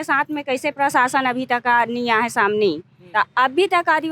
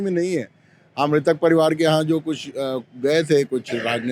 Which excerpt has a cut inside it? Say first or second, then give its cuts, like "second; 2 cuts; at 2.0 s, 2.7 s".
first; 1 cut; at 2.9 s